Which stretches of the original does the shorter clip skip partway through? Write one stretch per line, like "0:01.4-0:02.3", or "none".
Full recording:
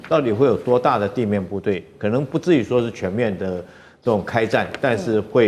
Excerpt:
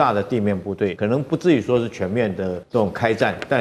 0:01.8-0:02.0
0:03.6-0:03.9

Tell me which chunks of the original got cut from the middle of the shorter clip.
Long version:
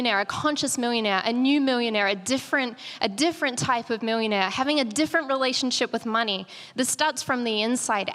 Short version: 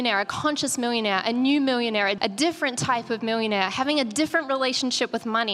0:02.2-0:03.0

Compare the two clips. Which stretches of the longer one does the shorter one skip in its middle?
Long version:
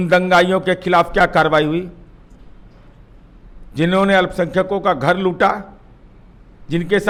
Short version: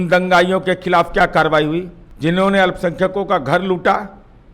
0:02.0-0:03.6

